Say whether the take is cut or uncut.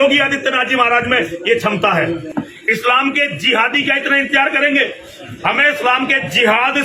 cut